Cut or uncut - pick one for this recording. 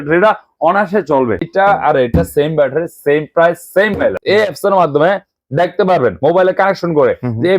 cut